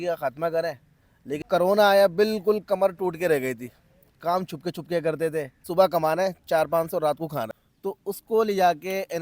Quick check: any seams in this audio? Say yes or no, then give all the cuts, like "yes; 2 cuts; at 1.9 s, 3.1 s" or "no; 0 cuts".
yes; 3 cuts; at 1.4 s, 5.6 s, 7.6 s